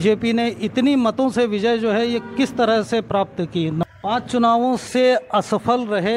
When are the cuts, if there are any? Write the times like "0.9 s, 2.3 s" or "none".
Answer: 3.8 s